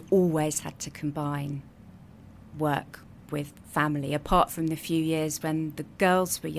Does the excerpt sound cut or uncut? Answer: uncut